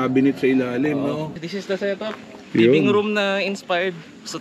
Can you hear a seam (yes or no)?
yes